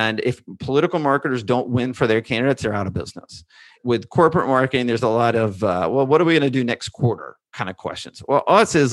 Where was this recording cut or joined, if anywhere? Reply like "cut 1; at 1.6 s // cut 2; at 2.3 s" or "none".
cut 1; at 3.8 s